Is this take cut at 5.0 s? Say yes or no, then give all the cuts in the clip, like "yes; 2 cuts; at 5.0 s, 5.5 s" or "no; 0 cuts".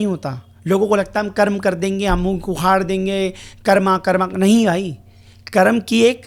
no; 0 cuts